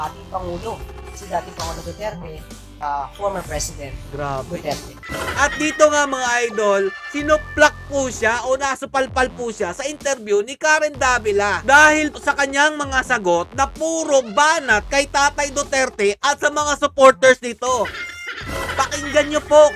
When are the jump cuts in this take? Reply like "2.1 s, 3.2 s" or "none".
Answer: 5.0 s